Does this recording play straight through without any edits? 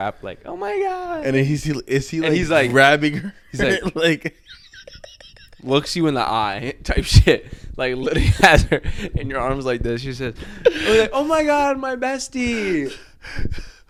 yes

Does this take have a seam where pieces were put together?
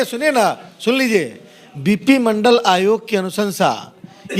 no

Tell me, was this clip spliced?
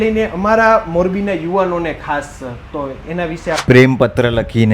yes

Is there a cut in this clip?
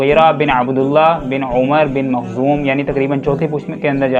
no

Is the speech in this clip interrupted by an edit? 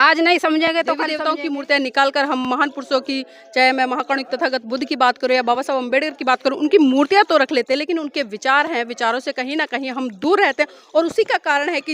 yes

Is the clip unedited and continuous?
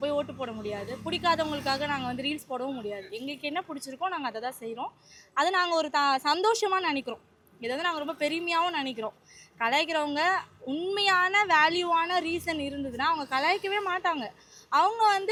yes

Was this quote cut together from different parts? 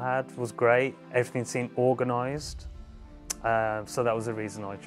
yes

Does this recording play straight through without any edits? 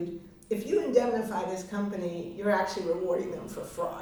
yes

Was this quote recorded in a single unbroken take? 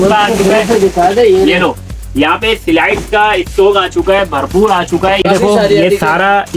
no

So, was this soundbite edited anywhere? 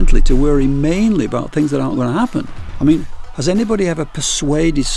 yes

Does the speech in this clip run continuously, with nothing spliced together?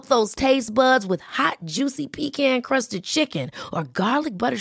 yes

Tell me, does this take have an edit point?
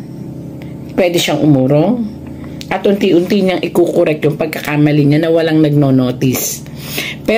no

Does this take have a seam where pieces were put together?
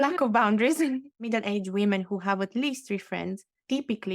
yes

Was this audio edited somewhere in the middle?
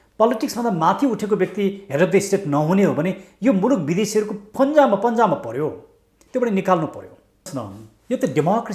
yes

